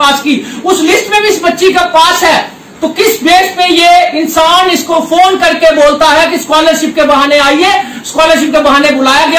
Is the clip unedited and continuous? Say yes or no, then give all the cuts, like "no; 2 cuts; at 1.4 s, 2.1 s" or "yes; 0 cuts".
yes; 0 cuts